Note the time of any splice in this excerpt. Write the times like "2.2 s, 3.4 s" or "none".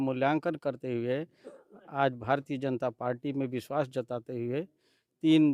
none